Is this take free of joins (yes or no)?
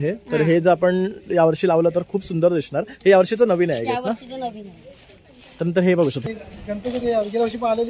no